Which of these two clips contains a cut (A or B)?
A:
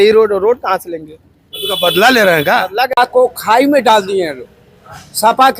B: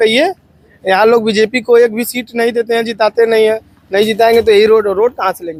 A